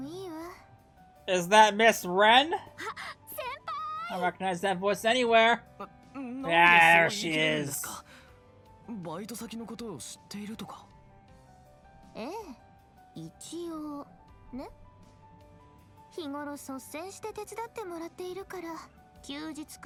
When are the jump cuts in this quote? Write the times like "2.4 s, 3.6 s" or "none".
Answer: none